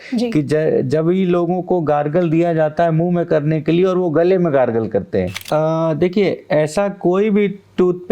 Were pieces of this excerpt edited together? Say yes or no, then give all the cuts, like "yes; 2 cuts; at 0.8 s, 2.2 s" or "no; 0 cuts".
yes; 1 cut; at 5.4 s